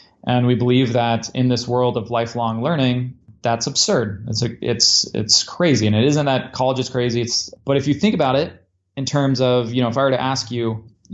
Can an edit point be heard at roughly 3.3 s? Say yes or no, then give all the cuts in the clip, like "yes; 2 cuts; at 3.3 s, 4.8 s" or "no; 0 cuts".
yes; 1 cut; at 3.3 s